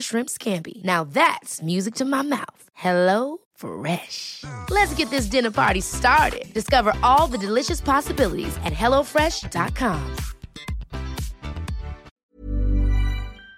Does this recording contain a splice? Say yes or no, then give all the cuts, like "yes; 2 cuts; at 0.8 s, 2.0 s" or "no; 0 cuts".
yes; 1 cut; at 12.2 s